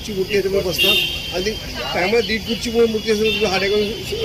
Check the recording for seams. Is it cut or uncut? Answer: uncut